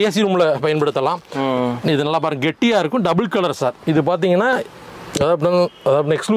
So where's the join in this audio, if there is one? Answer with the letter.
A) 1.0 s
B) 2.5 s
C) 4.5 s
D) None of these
D